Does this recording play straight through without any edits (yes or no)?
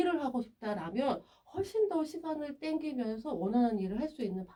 yes